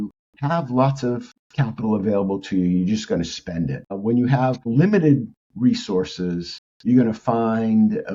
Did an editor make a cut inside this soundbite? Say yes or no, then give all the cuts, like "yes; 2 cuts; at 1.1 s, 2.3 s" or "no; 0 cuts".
no; 0 cuts